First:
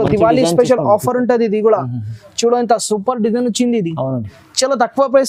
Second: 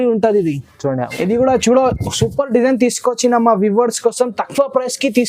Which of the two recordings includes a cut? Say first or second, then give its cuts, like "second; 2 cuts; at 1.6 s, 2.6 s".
second; 1 cut; at 1.1 s